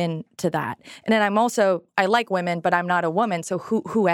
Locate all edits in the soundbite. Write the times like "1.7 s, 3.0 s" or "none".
1.9 s